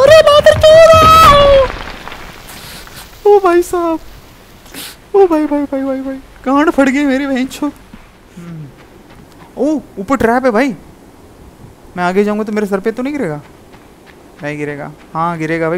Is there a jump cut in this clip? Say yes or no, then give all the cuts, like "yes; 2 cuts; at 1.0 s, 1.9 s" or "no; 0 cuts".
yes; 1 cut; at 8.2 s